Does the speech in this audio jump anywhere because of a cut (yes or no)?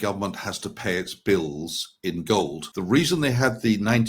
yes